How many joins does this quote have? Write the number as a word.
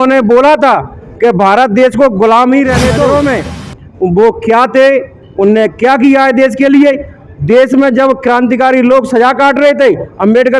one